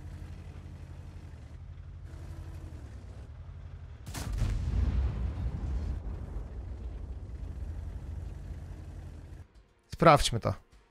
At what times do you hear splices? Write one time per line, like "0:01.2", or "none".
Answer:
0:09.8

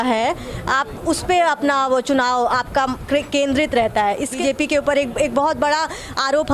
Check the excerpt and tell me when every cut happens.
0:04.4

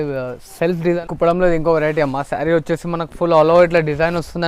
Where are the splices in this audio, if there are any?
0:01.0

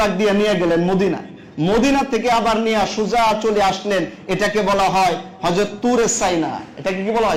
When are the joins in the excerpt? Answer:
none

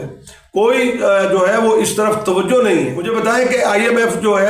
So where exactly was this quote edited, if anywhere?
0:03.0

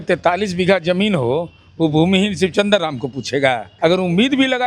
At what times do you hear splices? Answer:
0:03.7

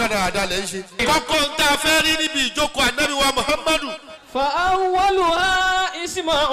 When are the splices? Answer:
0:01.0

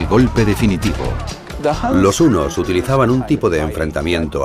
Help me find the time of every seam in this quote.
none

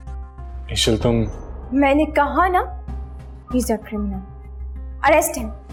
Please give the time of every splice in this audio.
none

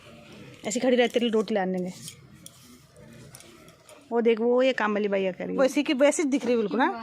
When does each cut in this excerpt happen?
0:05.6

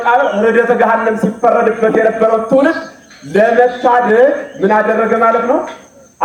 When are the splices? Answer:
none

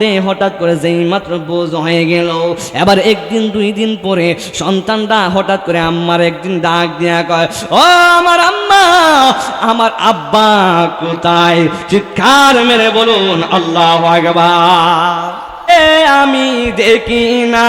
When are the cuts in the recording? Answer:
0:15.6

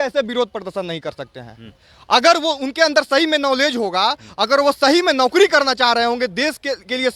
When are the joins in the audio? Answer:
none

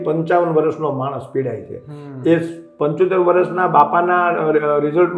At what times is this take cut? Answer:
none

